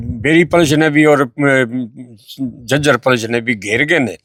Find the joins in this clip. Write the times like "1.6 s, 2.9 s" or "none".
none